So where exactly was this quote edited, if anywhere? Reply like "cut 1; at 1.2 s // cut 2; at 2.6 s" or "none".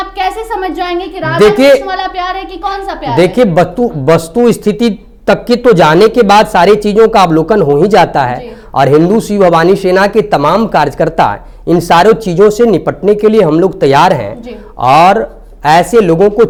none

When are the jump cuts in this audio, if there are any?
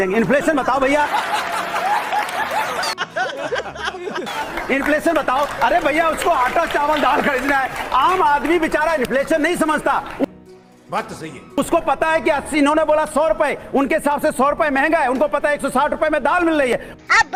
none

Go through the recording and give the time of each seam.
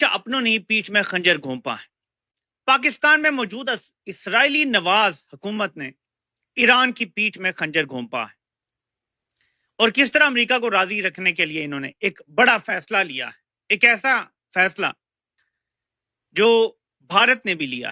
none

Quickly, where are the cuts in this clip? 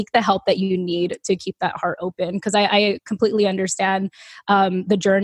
none

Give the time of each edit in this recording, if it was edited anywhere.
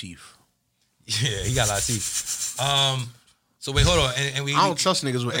none

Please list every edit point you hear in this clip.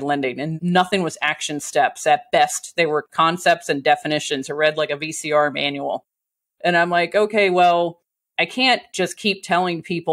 none

